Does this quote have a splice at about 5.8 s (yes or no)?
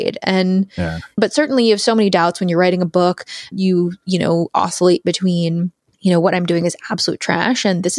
yes